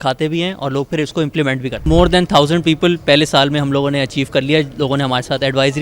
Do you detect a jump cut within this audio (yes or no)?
yes